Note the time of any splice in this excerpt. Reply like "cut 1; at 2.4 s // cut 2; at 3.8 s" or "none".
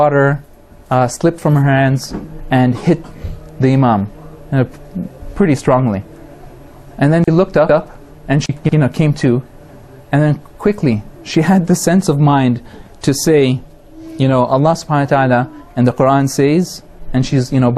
cut 1; at 11.6 s